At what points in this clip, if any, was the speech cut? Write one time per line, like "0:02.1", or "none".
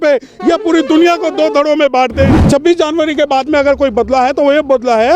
0:02.4